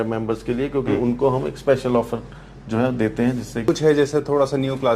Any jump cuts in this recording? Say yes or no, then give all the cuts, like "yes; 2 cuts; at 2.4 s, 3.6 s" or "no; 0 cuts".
yes; 1 cut; at 3.6 s